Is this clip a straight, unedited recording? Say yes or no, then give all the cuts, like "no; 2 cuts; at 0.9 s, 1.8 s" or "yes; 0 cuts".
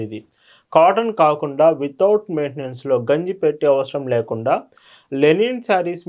yes; 0 cuts